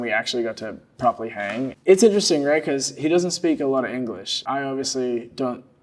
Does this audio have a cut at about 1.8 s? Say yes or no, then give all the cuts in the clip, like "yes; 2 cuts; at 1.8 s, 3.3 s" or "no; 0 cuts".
yes; 1 cut; at 1.8 s